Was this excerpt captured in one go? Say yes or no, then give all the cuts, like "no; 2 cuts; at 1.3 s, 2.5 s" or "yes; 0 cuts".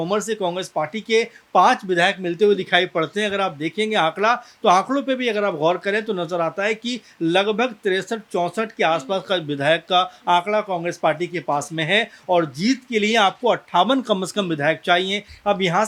yes; 0 cuts